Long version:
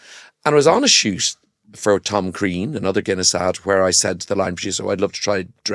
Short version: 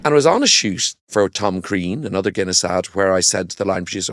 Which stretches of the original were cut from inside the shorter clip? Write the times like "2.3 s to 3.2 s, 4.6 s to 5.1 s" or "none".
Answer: 1.3 s to 1.6 s